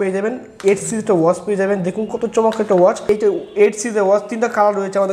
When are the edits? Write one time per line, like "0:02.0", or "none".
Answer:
0:03.1